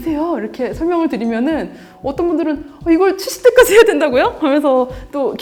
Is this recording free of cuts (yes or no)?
yes